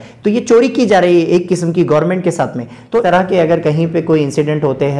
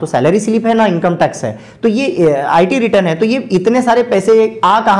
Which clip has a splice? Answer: first; 1 cut; at 3.0 s

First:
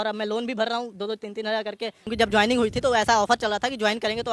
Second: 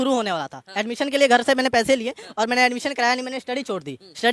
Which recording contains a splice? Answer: first; 1 cut; at 2.0 s

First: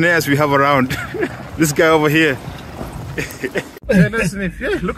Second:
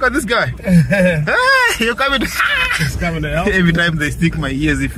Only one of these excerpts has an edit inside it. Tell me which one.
first; 2 cuts; at 1.4 s, 3.9 s

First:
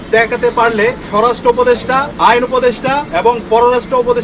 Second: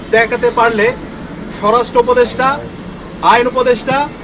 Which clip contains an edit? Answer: first; 3 cuts; at 1.0 s, 2.1 s, 3.1 s

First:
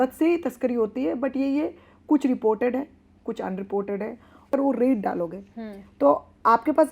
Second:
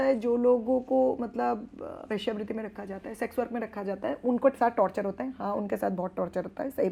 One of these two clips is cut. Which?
first; 1 cut; at 4.5 s

